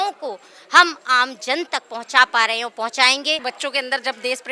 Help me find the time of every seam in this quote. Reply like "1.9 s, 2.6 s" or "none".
3.5 s